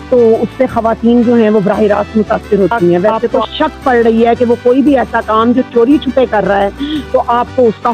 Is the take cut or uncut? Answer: cut